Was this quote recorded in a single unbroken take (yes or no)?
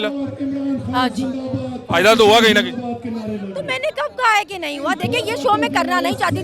yes